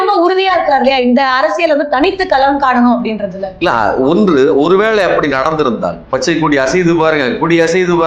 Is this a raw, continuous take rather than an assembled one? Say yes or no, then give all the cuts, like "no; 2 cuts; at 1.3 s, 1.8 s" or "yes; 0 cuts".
no; 1 cut; at 6.0 s